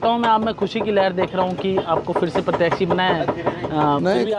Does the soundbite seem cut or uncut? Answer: uncut